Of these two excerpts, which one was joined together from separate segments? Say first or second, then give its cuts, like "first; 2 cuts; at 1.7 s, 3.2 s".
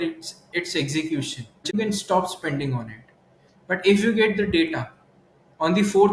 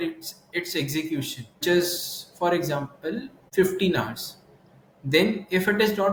first; 1 cut; at 1.6 s